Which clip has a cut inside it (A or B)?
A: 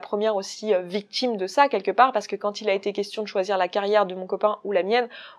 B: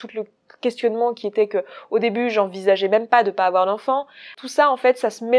B